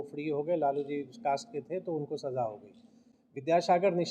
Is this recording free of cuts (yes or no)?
yes